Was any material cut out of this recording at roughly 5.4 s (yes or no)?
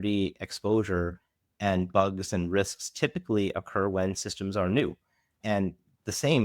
yes